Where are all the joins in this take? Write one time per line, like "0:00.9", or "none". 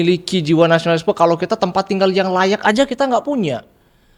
none